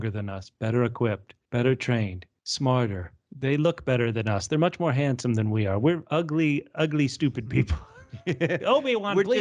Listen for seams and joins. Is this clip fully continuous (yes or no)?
yes